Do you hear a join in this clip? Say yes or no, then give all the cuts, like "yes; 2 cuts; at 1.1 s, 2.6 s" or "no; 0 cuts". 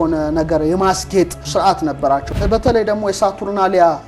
yes; 1 cut; at 2.4 s